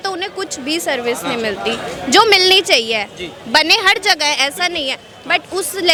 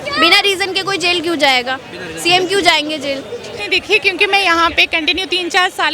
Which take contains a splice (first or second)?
second